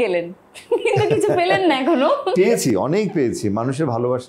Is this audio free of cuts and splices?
yes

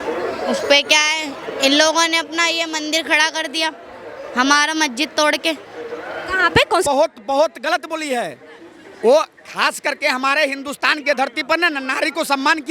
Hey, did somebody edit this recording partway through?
yes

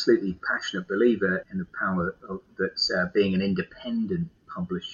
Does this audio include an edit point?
yes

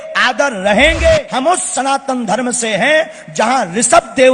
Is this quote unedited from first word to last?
no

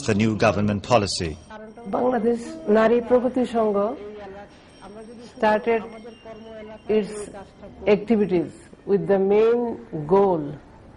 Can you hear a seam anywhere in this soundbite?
no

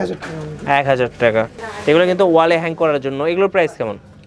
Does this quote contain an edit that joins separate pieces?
yes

